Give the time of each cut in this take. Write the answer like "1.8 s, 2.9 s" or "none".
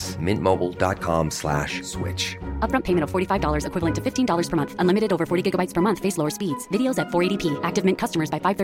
none